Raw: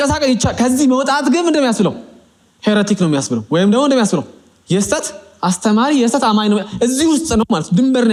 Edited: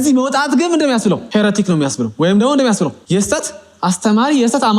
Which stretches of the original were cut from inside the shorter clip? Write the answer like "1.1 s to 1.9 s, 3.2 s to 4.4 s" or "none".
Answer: 2.0 s to 2.6 s, 4.3 s to 4.6 s